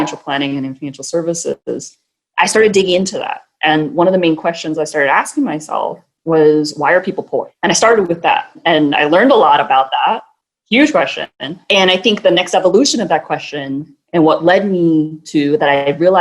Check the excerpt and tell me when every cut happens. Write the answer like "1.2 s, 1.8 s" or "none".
6.1 s, 7.5 s, 8.6 s, 11.6 s

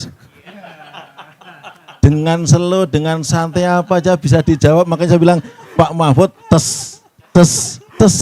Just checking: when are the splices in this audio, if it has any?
none

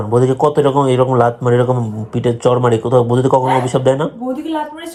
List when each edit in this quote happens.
none

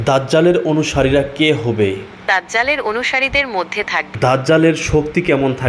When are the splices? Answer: 2.2 s, 4.1 s

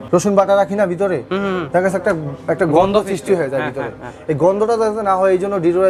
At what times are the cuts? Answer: none

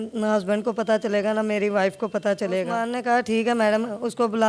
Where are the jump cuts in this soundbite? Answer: 2.8 s

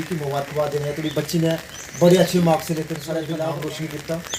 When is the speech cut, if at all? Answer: 3.3 s

